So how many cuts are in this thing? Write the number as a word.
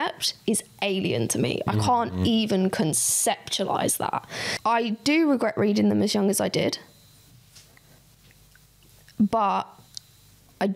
one